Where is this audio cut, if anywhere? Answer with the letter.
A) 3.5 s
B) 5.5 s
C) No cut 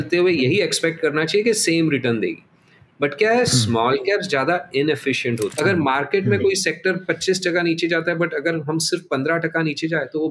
B